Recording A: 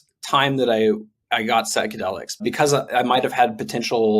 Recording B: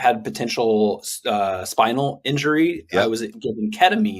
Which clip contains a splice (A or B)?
A